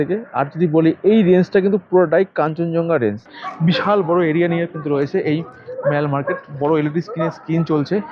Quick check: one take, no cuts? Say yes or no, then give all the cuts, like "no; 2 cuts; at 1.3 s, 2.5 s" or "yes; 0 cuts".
no; 1 cut; at 3.3 s